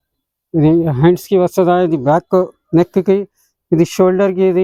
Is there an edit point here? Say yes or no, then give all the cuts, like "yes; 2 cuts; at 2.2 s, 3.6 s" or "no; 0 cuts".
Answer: no; 0 cuts